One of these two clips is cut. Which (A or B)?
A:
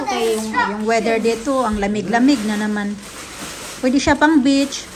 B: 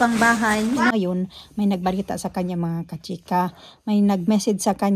B